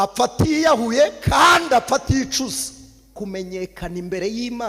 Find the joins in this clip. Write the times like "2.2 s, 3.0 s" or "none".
3.1 s